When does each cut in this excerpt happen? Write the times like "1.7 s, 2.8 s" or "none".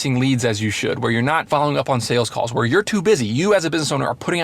1.4 s